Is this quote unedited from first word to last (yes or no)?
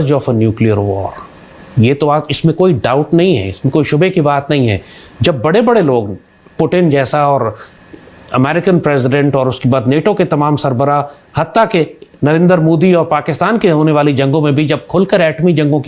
yes